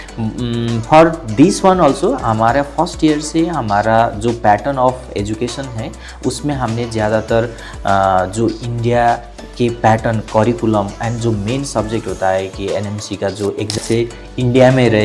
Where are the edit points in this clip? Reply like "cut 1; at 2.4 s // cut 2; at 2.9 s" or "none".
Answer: cut 1; at 13.8 s